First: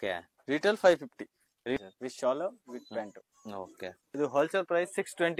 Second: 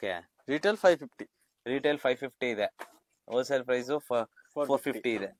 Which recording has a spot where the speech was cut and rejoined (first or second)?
first